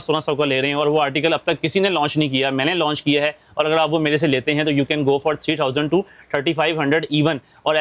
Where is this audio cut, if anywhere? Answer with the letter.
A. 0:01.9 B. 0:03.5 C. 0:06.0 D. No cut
D